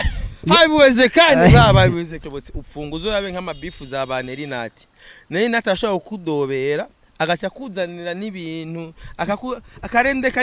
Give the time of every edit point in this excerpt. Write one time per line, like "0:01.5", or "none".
0:02.1